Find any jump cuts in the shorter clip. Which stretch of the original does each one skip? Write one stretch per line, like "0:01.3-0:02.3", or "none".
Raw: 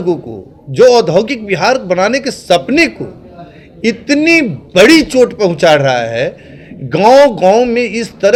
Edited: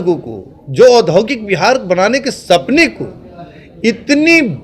none